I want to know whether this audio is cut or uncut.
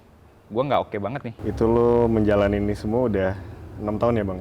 cut